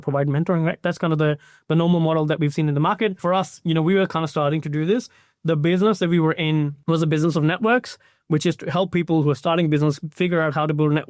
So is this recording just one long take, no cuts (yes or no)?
no